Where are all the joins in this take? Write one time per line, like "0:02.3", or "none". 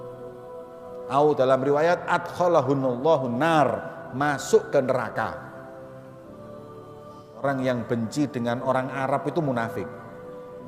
0:01.1
0:05.3
0:07.2